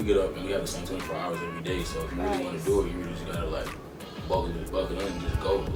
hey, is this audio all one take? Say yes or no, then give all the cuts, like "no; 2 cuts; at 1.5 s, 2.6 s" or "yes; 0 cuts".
yes; 0 cuts